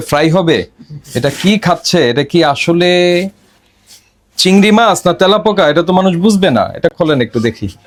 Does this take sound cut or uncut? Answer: uncut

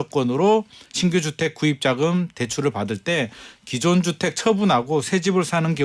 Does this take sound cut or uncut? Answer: uncut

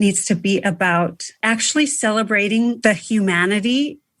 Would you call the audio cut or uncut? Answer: cut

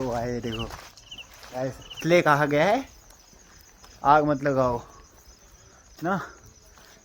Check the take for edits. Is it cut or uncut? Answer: cut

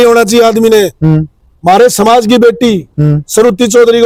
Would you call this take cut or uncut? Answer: uncut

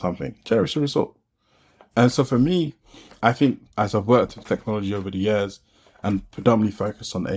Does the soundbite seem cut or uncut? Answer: cut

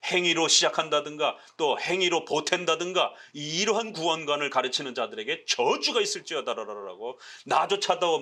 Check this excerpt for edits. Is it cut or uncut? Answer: uncut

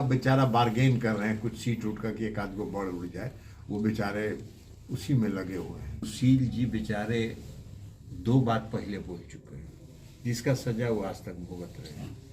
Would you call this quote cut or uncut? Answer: cut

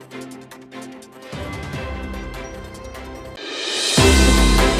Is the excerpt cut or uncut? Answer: uncut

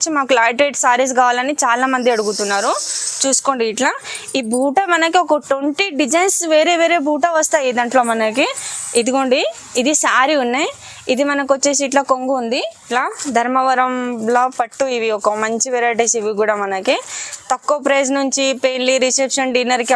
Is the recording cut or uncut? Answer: cut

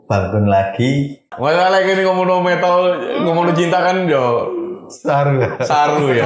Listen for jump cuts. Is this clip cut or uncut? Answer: cut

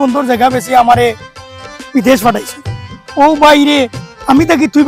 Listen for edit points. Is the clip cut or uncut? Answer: uncut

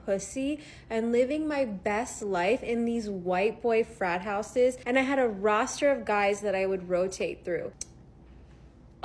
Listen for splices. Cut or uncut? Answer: cut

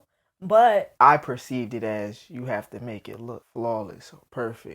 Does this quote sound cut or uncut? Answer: cut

